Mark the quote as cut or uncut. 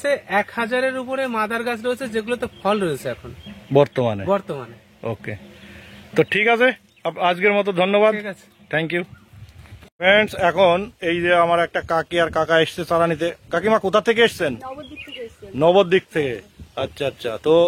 uncut